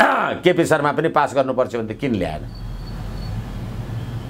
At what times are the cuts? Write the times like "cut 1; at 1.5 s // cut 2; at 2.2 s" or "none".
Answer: none